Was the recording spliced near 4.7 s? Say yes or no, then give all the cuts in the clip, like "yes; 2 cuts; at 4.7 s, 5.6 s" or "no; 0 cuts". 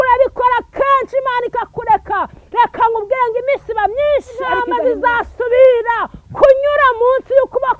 yes; 1 cut; at 4.7 s